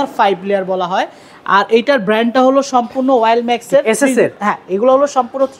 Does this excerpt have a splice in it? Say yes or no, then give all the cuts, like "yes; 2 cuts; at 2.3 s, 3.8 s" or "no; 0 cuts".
no; 0 cuts